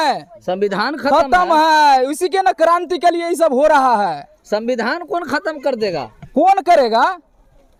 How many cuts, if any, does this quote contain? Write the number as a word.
zero